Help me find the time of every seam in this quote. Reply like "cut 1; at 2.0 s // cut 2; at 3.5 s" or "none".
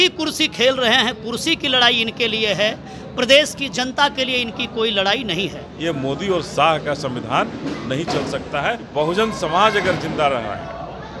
cut 1; at 5.7 s // cut 2; at 8.8 s